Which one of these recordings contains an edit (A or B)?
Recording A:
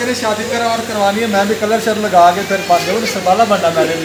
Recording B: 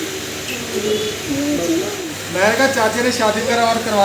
B